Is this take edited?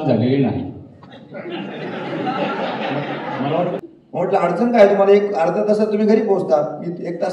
yes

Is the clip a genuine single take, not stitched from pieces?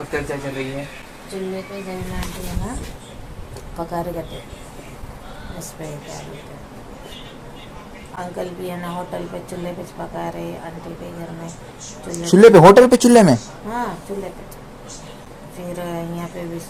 yes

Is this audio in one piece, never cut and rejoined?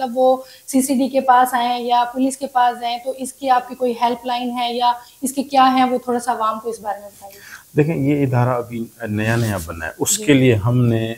yes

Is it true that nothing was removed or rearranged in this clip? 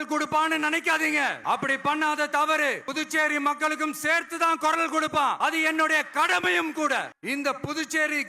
no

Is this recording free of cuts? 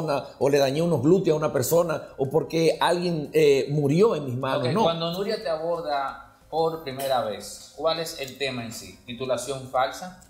yes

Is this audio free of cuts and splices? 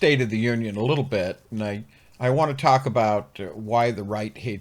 yes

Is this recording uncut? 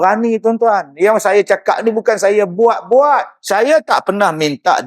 no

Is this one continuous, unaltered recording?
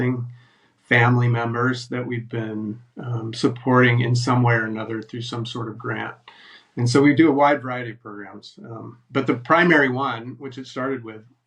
yes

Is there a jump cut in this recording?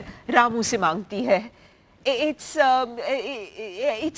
no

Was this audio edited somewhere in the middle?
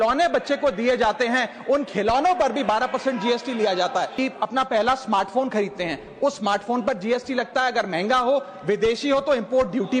yes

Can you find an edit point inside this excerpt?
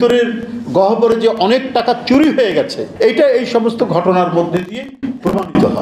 yes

